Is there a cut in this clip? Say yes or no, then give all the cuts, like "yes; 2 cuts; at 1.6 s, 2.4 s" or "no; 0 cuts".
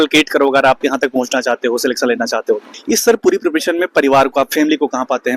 yes; 1 cut; at 2.7 s